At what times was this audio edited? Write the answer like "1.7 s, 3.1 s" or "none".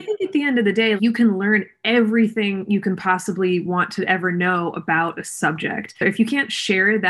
1.0 s, 6.0 s

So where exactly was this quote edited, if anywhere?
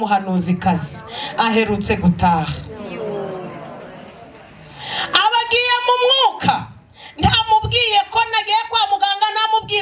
none

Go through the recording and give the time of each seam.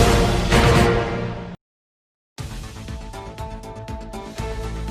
2.2 s

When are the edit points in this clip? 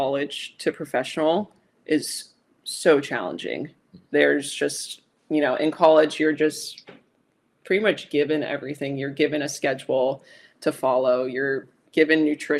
none

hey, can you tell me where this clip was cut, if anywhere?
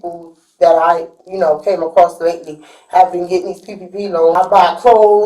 4.4 s

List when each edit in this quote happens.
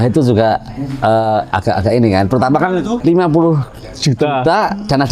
3.0 s

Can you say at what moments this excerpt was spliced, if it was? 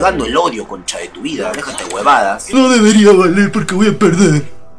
2.5 s

